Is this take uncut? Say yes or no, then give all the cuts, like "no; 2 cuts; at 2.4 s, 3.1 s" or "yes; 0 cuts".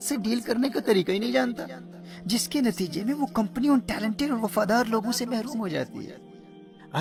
yes; 0 cuts